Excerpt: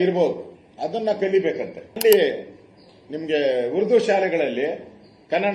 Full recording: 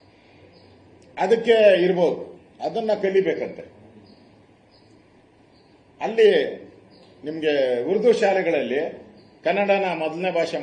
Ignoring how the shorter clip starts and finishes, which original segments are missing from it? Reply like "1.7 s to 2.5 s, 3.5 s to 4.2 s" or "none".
3.8 s to 6.1 s